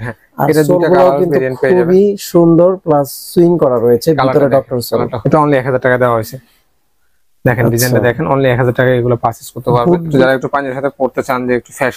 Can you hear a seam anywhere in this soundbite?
yes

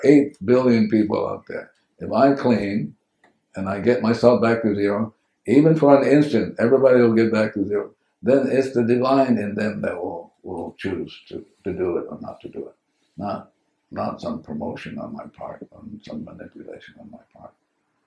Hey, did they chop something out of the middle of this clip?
no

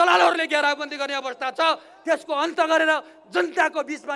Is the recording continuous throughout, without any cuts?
yes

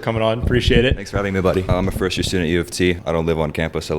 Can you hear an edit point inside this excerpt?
yes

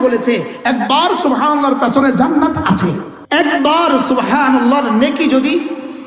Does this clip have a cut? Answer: yes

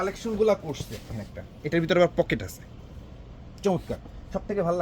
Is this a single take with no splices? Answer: no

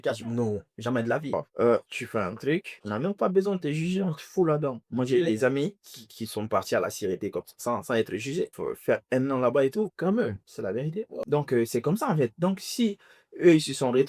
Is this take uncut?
no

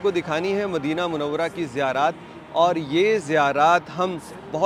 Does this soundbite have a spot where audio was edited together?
no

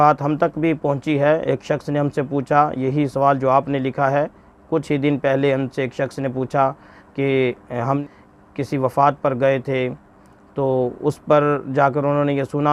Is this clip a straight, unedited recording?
no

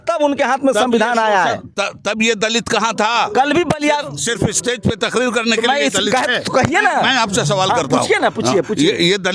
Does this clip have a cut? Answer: no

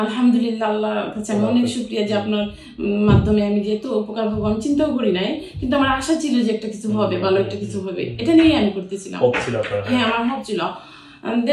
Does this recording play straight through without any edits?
yes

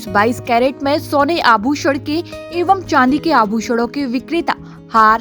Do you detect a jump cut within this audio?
no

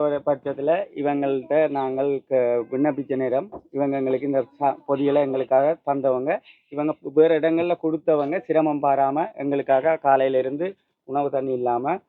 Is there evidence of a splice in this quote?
no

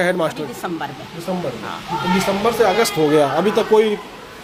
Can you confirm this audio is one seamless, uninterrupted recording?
yes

